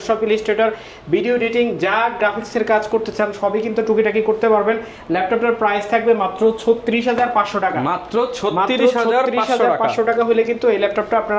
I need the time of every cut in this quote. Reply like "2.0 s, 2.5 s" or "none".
none